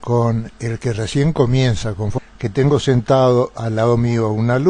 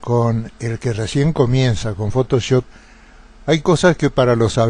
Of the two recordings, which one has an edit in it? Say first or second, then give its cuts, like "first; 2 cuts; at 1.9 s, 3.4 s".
second; 1 cut; at 2.1 s